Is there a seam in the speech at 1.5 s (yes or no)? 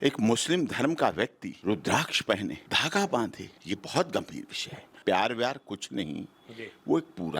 yes